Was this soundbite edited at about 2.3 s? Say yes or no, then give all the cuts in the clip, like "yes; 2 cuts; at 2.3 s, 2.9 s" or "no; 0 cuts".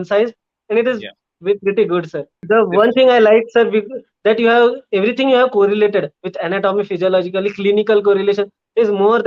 yes; 1 cut; at 2.3 s